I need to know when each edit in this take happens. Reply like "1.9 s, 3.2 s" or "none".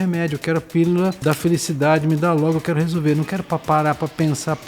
1.2 s